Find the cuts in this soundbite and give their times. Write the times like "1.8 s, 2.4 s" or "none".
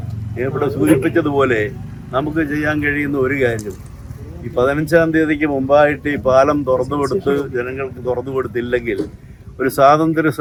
none